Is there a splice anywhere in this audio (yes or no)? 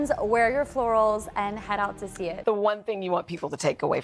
yes